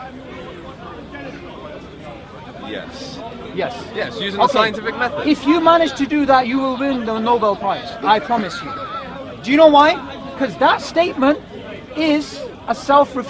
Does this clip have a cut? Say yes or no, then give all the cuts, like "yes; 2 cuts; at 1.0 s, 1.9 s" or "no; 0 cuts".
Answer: no; 0 cuts